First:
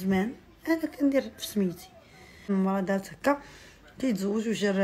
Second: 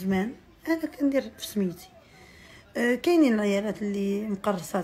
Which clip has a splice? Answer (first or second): first